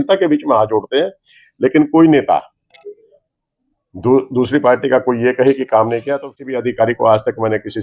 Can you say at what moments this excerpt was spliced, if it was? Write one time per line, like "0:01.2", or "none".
0:06.2